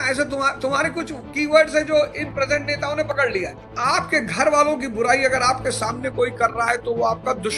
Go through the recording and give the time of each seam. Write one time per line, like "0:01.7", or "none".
0:03.5